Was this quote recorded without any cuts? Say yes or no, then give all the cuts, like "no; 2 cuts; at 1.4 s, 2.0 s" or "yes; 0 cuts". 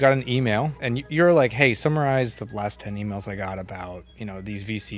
yes; 0 cuts